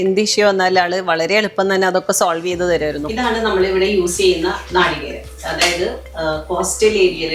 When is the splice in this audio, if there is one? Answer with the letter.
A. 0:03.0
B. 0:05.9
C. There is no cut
A